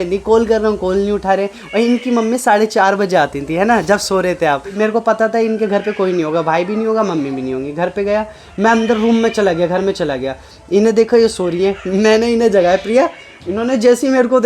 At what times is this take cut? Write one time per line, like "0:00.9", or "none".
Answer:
0:04.7